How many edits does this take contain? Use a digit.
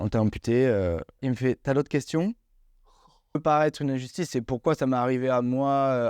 2